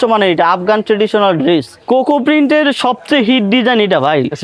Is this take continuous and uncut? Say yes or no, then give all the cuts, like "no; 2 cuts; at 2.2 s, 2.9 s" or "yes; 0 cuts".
no; 1 cut; at 1.8 s